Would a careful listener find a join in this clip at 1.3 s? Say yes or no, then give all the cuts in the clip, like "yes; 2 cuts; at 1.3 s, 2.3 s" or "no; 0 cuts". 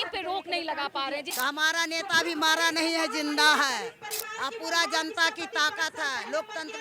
yes; 1 cut; at 1.3 s